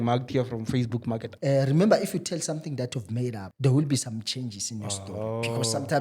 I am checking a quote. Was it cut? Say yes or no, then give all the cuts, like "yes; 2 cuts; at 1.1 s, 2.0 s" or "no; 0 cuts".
yes; 2 cuts; at 1.3 s, 3.5 s